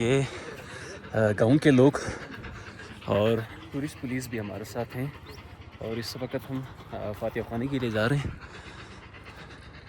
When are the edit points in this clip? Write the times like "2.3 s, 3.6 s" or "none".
none